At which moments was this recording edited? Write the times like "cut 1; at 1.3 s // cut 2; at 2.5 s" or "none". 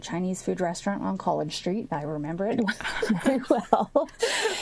none